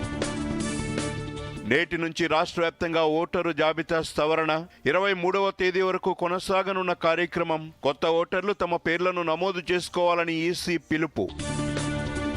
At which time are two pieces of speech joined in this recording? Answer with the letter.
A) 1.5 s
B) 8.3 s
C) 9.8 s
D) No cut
D